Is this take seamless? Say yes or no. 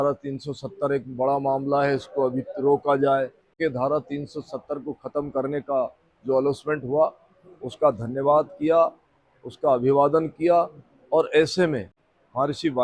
no